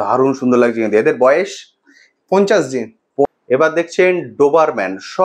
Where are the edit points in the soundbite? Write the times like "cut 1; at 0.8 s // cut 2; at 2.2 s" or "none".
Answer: cut 1; at 3.2 s

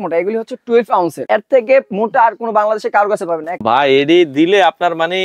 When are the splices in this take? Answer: cut 1; at 1.2 s // cut 2; at 3.6 s

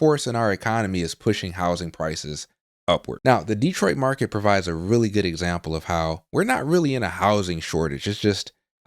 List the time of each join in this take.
cut 1; at 3.1 s

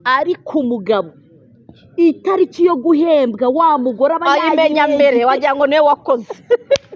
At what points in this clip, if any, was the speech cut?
none

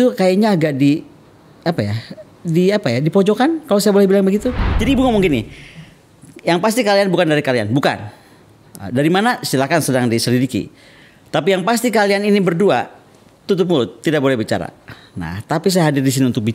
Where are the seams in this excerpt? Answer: cut 1; at 4.7 s

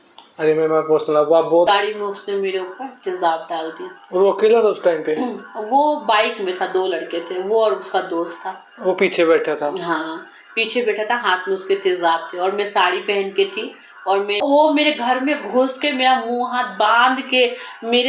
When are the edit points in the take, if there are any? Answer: cut 1; at 1.7 s // cut 2; at 14.4 s

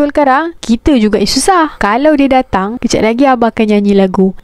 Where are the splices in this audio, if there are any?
cut 1; at 1.7 s

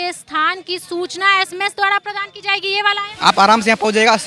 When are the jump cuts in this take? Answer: cut 1; at 3.1 s

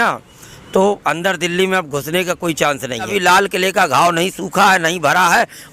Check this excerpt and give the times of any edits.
cut 1; at 3.1 s

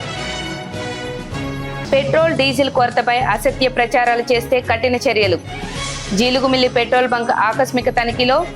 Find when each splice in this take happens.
cut 1; at 1.1 s

